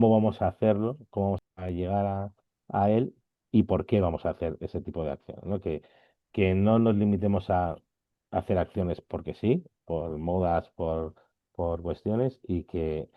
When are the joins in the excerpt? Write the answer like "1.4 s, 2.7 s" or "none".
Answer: 1.5 s